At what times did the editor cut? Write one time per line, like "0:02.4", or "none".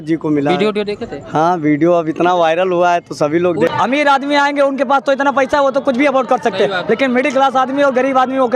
0:03.7